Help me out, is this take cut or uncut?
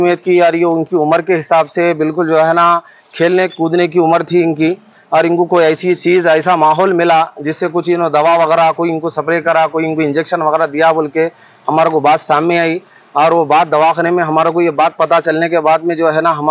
uncut